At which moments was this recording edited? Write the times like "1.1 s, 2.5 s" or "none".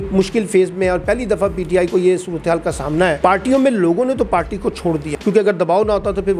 3.2 s, 5.1 s